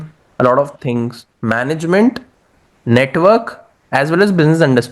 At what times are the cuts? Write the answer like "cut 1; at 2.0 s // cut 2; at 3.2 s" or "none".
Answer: cut 1; at 1.2 s